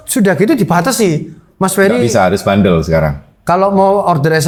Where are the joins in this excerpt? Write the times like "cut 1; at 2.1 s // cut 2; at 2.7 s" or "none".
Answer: none